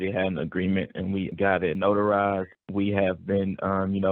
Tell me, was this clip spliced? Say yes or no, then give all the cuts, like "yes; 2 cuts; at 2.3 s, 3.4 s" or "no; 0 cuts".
yes; 2 cuts; at 1.3 s, 2.5 s